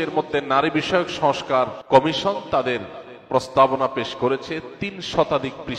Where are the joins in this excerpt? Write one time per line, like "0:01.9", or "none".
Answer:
0:01.8